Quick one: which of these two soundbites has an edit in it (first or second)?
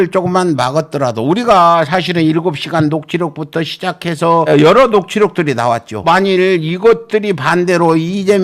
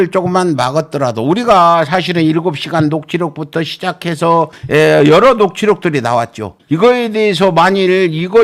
first